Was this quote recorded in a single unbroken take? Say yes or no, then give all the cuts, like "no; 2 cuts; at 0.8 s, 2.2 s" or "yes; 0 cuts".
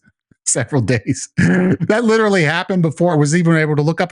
no; 2 cuts; at 1.8 s, 3.1 s